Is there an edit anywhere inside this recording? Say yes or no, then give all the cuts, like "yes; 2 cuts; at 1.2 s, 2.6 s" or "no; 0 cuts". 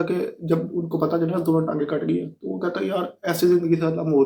no; 0 cuts